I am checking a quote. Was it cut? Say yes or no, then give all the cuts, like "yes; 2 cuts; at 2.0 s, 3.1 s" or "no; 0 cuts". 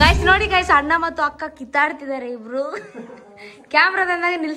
no; 0 cuts